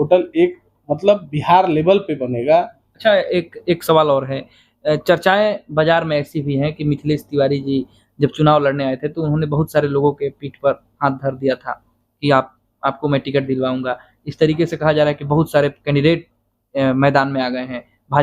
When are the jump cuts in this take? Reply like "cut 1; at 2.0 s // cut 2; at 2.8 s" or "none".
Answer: cut 1; at 2.8 s